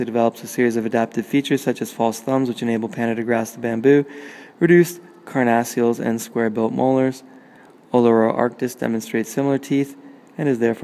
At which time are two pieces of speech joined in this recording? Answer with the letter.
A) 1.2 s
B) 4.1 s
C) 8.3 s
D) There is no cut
A